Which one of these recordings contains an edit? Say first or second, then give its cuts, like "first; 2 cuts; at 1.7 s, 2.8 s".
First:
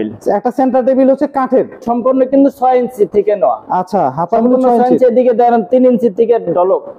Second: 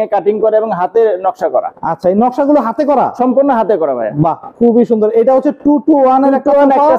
first; 1 cut; at 1.8 s